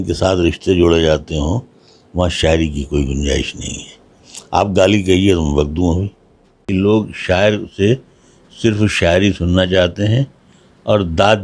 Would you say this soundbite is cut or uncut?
cut